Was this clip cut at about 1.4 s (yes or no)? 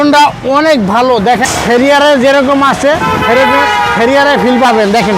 yes